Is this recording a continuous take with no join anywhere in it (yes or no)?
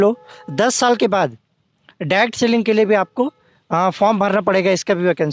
yes